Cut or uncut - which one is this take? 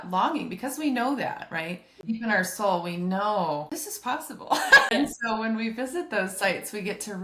cut